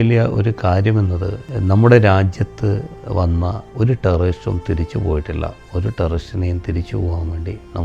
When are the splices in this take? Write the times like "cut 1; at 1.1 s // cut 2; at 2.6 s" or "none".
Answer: cut 1; at 1.4 s // cut 2; at 3.6 s